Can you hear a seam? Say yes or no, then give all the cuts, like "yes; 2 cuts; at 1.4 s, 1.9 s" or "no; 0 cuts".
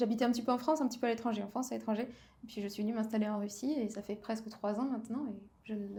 no; 0 cuts